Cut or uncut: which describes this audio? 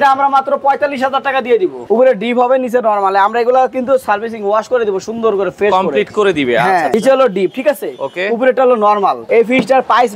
cut